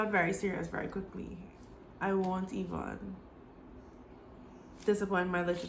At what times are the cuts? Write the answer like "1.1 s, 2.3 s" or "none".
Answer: 1.4 s